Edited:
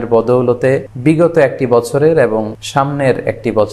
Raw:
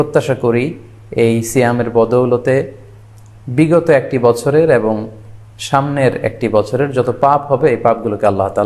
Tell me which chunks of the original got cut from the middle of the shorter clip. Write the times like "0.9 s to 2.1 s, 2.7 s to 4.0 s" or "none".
2.7 s to 3.4 s, 5.1 s to 5.6 s